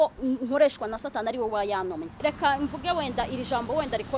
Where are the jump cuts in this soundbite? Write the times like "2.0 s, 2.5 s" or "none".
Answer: 2.2 s